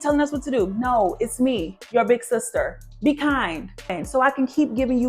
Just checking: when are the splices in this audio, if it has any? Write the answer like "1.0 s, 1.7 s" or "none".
4.0 s